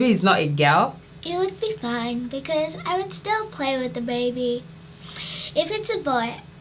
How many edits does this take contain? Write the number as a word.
one